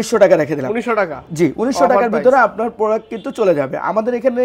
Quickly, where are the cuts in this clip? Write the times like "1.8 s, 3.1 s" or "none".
none